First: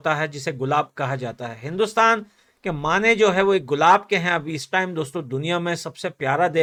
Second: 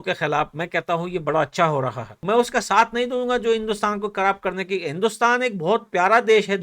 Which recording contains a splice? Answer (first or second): second